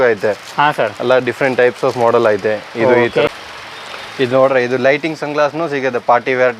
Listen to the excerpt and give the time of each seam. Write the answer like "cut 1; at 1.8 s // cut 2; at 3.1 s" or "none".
cut 1; at 3.3 s